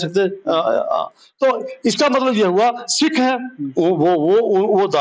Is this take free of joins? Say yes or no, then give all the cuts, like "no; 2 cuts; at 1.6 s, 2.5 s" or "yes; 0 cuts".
yes; 0 cuts